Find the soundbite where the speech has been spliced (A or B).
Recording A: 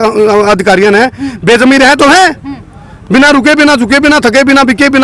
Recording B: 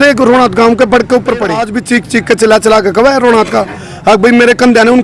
B